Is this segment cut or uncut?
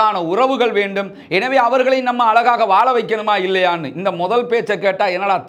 uncut